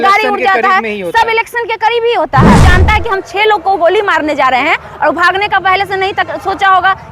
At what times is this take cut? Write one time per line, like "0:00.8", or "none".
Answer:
0:02.6